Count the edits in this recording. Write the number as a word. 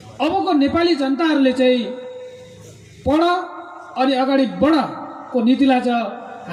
zero